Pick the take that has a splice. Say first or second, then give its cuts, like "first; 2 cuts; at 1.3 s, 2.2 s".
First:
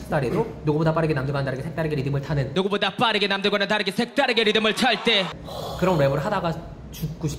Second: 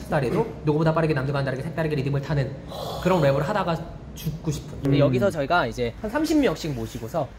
second; 2 cuts; at 2.5 s, 4.9 s